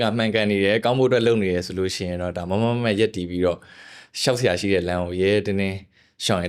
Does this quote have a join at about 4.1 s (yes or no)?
no